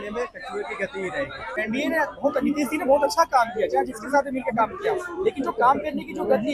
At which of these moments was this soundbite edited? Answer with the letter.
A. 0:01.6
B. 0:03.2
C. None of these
A